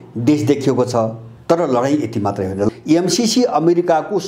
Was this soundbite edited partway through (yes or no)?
yes